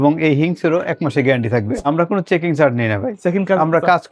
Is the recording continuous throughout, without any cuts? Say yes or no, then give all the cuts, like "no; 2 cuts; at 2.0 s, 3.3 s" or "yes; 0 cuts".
no; 1 cut; at 1.9 s